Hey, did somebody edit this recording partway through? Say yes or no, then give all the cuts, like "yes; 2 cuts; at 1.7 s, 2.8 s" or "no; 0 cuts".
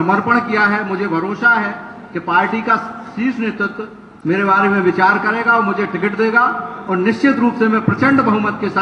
no; 0 cuts